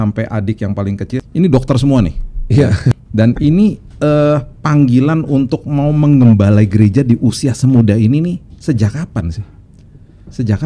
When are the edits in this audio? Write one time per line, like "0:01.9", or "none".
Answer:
0:01.2
0:03.0